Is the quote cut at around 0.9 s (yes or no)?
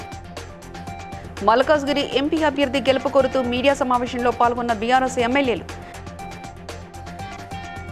yes